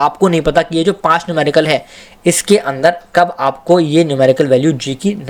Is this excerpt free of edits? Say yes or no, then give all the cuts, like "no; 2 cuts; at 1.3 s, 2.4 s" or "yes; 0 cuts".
yes; 0 cuts